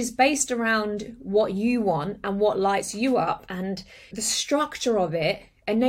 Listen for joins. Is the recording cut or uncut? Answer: cut